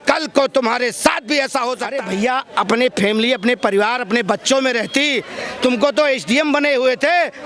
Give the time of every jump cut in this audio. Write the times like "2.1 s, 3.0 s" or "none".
1.9 s